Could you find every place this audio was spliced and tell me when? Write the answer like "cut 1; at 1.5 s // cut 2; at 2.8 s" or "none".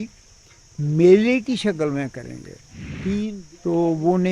cut 1; at 3.4 s

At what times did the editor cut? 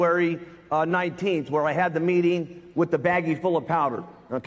none

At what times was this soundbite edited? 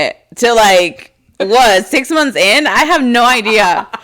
none

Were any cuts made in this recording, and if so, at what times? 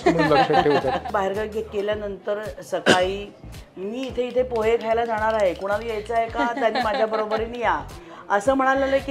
cut 1; at 1.1 s

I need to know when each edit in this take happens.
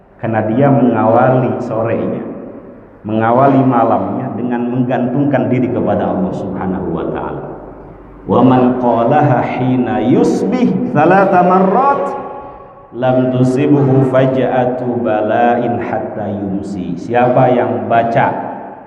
none

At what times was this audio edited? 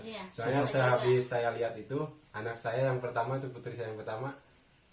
none

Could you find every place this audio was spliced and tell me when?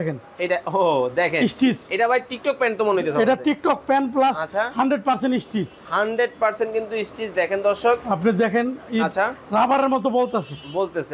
none

